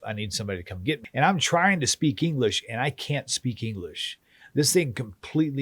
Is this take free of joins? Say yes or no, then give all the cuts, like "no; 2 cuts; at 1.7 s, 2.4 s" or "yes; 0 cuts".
no; 1 cut; at 1.0 s